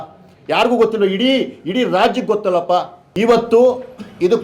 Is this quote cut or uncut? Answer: cut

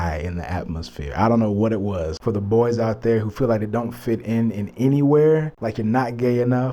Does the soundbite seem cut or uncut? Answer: cut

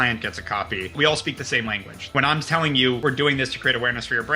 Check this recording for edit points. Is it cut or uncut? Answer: cut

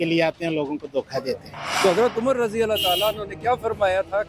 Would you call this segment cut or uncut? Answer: cut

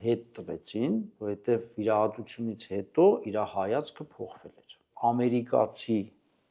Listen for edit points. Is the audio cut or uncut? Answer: cut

